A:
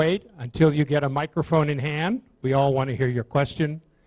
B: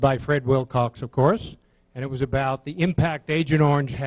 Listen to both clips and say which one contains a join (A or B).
B